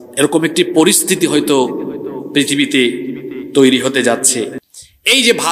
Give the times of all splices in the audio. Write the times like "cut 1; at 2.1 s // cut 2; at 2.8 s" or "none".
cut 1; at 4.5 s

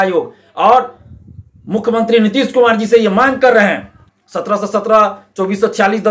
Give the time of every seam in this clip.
cut 1; at 4.1 s

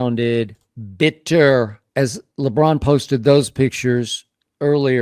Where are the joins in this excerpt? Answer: cut 1; at 1.8 s

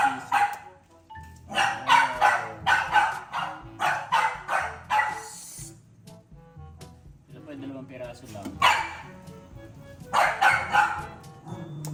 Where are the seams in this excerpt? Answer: none

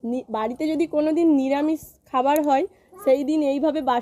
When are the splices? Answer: none

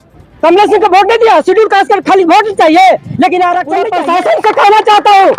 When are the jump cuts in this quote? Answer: cut 1; at 3.8 s

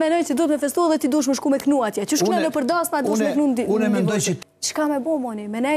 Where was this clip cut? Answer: cut 1; at 4.3 s

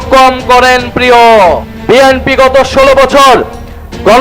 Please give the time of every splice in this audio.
cut 1; at 1.7 s

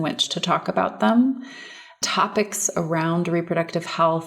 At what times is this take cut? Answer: cut 1; at 2.0 s

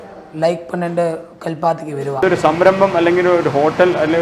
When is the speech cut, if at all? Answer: cut 1; at 2.2 s

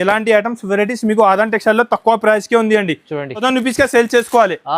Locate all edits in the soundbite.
cut 1; at 3.4 s

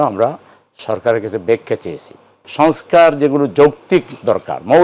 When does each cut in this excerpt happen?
cut 1; at 2.4 s

